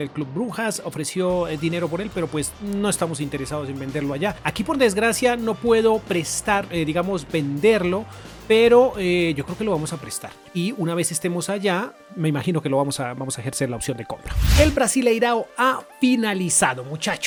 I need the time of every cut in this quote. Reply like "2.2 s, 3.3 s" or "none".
none